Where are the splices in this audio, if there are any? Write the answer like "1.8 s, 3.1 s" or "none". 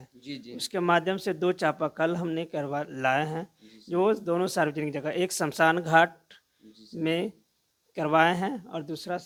none